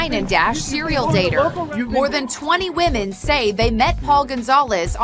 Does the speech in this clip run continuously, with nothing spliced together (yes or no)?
no